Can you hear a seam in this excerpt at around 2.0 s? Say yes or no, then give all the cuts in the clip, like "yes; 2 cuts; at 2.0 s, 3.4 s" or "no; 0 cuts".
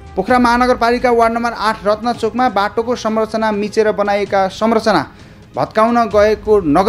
no; 0 cuts